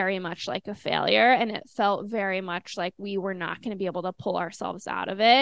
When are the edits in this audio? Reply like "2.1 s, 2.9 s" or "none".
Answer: none

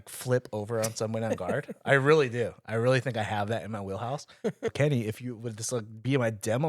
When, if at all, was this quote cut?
4.7 s

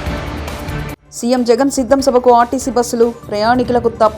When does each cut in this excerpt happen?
1.0 s

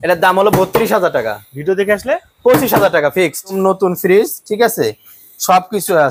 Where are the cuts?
3.6 s

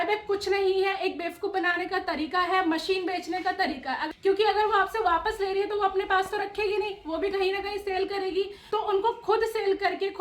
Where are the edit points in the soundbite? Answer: 4.0 s, 8.6 s

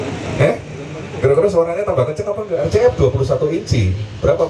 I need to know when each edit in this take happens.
2.7 s

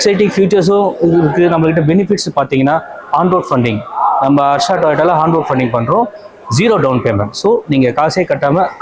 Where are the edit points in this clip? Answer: none

